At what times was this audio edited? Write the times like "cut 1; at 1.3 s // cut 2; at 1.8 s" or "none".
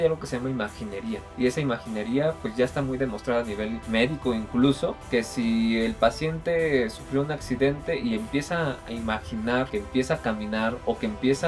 cut 1; at 1.2 s // cut 2; at 3.8 s // cut 3; at 5.0 s // cut 4; at 9.7 s